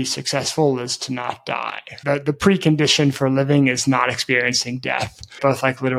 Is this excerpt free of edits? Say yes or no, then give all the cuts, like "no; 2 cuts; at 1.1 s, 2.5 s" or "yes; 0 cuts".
yes; 0 cuts